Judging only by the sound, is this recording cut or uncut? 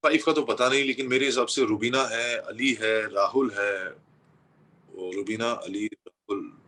uncut